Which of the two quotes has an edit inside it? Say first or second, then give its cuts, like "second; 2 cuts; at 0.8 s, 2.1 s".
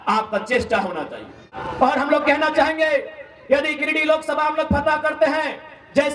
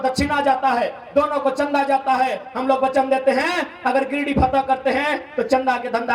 first; 1 cut; at 1.6 s